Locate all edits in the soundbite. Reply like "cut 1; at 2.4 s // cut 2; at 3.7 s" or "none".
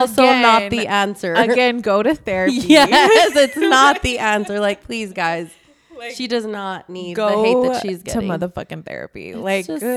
none